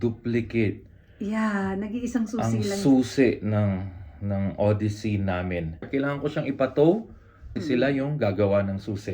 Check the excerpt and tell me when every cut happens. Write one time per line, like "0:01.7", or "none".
0:05.9
0:07.5